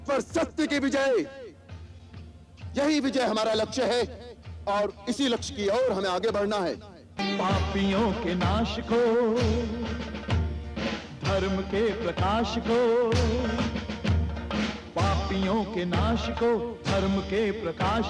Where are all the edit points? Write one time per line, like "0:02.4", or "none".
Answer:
0:07.2